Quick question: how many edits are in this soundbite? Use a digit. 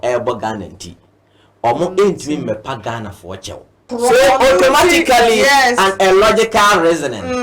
1